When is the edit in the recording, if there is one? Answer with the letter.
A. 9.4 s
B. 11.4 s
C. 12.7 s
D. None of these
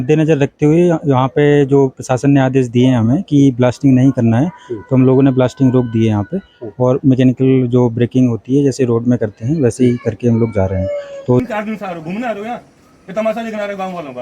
B